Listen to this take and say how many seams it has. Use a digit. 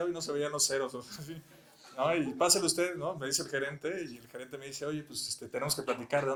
0